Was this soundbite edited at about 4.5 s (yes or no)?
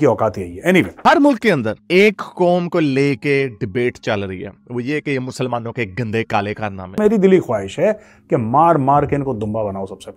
no